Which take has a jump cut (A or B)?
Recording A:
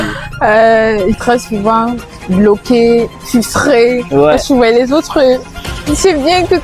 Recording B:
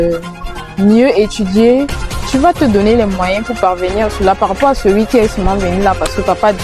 A